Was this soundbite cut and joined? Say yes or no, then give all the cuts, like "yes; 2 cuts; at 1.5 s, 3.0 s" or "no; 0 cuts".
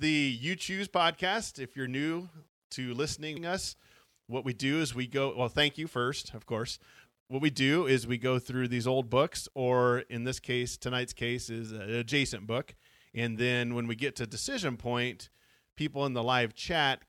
yes; 2 cuts; at 3.4 s, 7.1 s